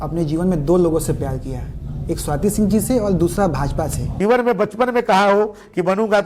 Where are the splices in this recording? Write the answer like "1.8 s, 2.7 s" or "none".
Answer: 4.1 s